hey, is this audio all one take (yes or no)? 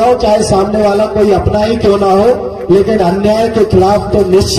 yes